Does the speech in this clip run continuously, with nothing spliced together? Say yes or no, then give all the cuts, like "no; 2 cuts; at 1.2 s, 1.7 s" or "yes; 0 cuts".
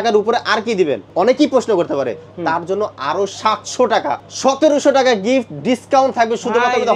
no; 2 cuts; at 1.0 s, 4.3 s